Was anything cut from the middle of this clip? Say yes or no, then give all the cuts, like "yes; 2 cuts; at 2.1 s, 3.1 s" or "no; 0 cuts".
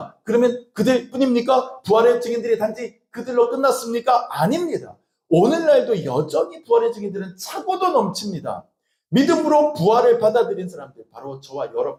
no; 0 cuts